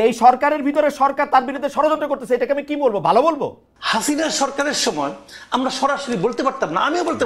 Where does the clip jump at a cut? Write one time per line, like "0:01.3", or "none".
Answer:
0:03.7

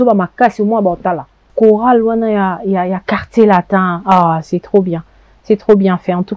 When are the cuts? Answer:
0:01.5

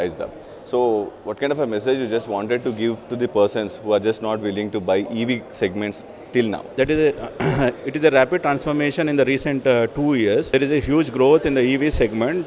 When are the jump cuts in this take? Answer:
0:06.7
0:10.5

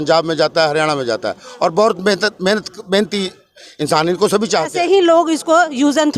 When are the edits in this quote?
0:04.7

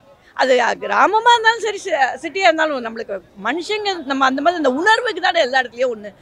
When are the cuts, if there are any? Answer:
none

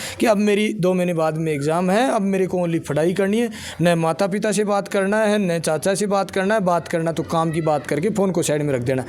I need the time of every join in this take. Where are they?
none

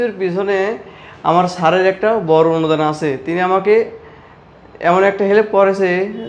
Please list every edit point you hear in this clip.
none

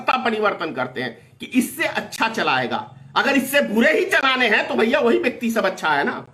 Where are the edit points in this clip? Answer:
none

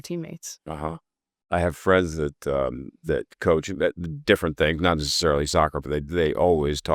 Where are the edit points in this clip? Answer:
0:01.5

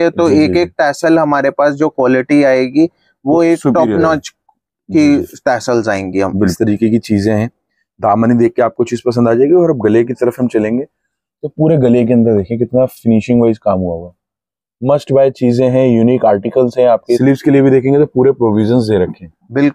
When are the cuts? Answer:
0:06.5
0:17.2

